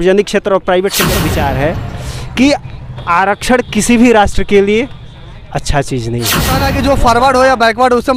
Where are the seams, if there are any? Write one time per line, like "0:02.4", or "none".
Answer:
0:01.1
0:06.6